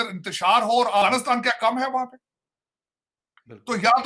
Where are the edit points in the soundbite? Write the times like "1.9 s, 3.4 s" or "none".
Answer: 1.0 s